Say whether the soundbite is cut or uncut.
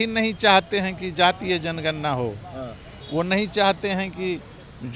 uncut